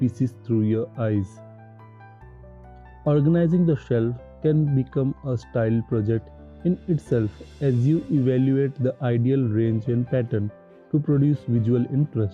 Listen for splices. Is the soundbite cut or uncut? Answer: cut